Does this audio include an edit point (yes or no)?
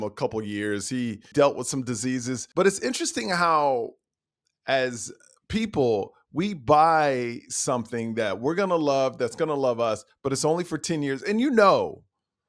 yes